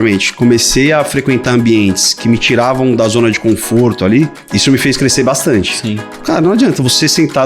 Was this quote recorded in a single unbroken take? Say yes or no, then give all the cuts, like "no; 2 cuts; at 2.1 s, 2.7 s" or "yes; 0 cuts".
no; 2 cuts; at 4.4 s, 6.2 s